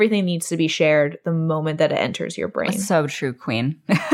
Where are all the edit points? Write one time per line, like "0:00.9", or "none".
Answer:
0:02.8